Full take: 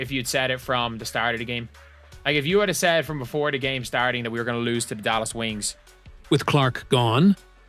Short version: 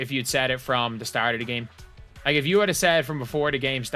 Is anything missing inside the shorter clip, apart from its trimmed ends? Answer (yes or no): no